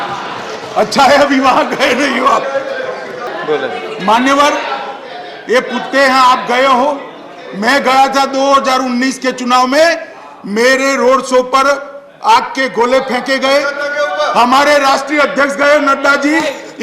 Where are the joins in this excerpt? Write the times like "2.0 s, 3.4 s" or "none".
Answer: 3.3 s